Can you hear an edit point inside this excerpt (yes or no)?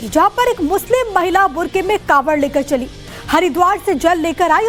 no